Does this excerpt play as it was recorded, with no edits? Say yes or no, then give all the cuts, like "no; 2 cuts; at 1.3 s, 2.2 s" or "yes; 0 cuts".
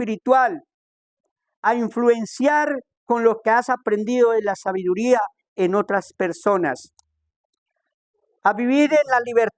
yes; 0 cuts